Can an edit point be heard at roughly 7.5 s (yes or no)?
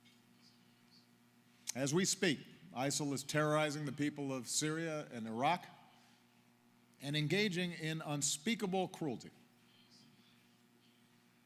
no